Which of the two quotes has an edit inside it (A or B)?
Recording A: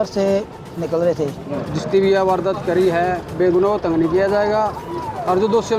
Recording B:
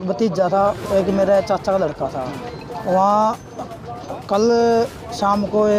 A